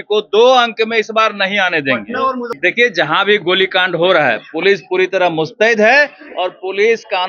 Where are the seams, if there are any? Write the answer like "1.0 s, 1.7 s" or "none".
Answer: 2.6 s